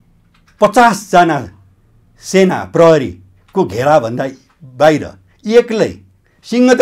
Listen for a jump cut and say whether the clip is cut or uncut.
uncut